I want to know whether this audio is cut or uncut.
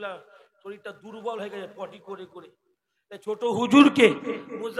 uncut